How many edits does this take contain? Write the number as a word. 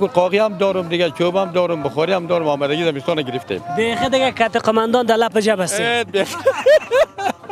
zero